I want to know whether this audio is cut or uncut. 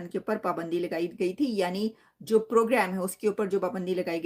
uncut